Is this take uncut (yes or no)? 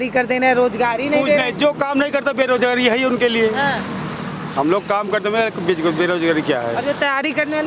yes